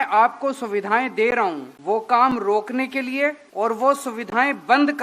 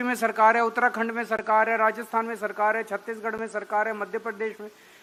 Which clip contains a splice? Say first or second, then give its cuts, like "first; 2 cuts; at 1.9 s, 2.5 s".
first; 2 cuts; at 1.7 s, 3.4 s